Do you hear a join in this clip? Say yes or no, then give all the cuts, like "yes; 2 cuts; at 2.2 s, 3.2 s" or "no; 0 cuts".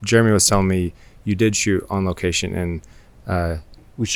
no; 0 cuts